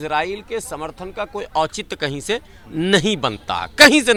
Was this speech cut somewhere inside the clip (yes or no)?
no